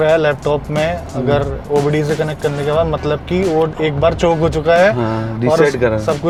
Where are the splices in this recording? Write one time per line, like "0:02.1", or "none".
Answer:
none